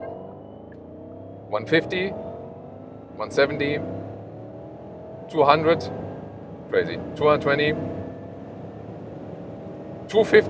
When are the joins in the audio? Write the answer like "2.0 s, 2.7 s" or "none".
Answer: none